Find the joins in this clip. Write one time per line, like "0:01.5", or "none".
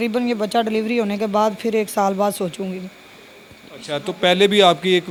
none